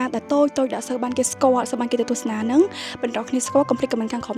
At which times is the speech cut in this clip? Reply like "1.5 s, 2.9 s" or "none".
none